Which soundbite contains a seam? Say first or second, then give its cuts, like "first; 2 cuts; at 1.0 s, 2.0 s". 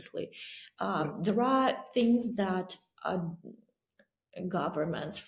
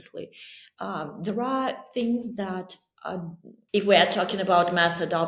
second; 1 cut; at 3.7 s